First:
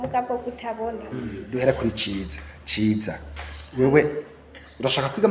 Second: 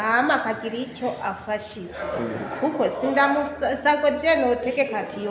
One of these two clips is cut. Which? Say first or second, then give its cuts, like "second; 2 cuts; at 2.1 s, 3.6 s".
first; 1 cut; at 1.4 s